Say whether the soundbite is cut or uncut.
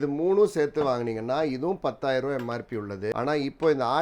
cut